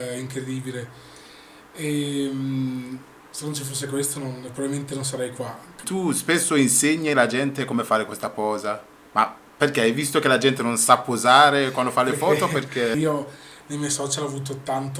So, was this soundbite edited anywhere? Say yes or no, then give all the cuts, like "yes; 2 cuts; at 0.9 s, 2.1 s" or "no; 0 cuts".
yes; 2 cuts; at 5.9 s, 12.9 s